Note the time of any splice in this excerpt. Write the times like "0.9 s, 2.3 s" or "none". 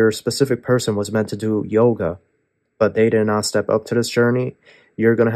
none